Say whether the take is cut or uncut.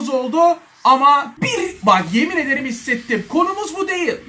cut